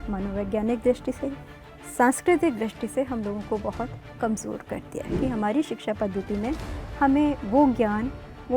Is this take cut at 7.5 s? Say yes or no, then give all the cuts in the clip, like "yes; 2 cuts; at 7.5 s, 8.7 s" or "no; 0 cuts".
no; 1 cut; at 5.2 s